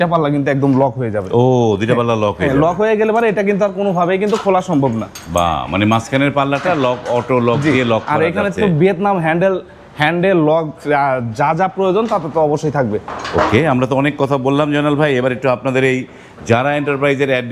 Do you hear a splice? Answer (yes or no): no